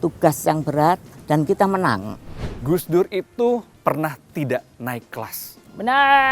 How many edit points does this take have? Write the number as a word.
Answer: zero